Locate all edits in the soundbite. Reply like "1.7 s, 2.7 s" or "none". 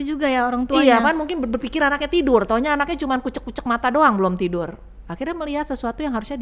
none